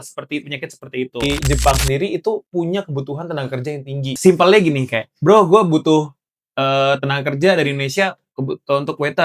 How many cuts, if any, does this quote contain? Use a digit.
2